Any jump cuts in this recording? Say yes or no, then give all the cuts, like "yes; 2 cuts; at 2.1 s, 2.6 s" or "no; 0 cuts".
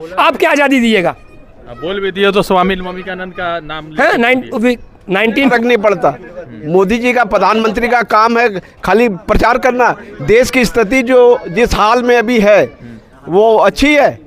yes; 1 cut; at 5.5 s